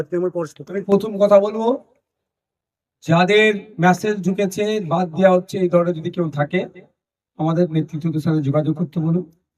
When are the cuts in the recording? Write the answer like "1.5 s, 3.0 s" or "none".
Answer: none

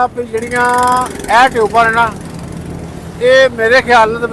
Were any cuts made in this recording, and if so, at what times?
none

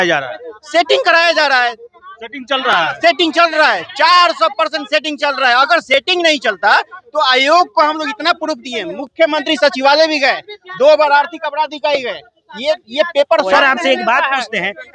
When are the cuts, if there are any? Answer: 13.6 s

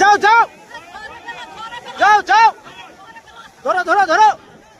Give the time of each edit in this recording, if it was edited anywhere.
none

